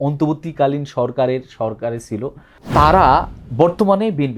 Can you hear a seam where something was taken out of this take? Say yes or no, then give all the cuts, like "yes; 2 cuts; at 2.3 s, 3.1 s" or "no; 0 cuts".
yes; 1 cut; at 2.6 s